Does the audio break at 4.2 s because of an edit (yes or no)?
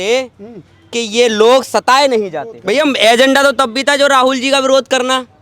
no